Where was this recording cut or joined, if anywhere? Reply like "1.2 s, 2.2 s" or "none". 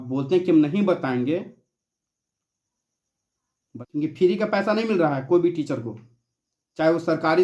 none